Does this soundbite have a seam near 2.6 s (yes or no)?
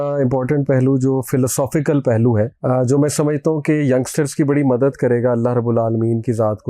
yes